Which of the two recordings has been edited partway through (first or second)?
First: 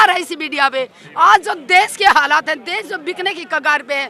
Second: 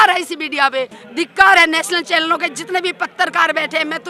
second